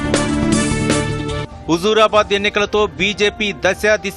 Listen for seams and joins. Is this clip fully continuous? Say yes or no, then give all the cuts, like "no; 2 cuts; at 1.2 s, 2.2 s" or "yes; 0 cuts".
yes; 0 cuts